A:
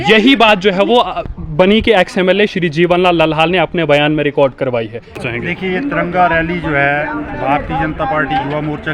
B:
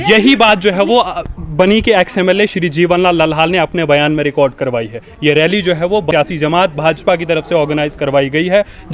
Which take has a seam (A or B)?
A